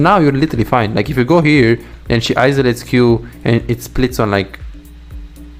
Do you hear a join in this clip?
no; 0 cuts

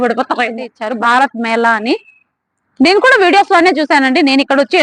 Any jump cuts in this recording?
yes; 1 cut; at 0.9 s

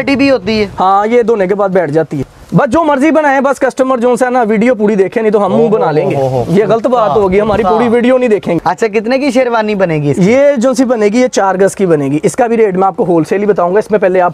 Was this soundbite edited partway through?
yes; 2 cuts; at 2.3 s, 8.6 s

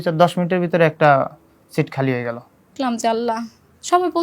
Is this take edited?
yes; 1 cut; at 2.7 s

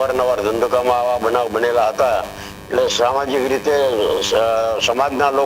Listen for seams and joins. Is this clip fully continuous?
yes; 0 cuts

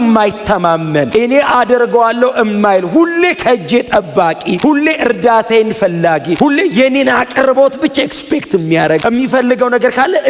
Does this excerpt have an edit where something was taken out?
yes; 4 cuts; at 1.1 s, 4.6 s, 6.3 s, 9.0 s

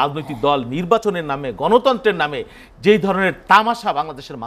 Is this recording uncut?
yes; 0 cuts

